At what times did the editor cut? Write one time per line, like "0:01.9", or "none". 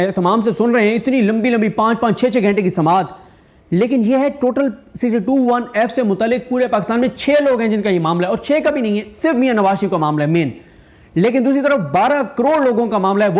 none